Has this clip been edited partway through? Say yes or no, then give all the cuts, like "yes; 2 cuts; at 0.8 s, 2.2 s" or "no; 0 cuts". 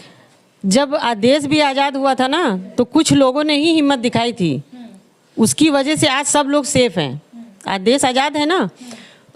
no; 0 cuts